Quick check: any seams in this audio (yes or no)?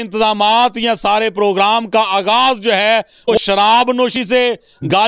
yes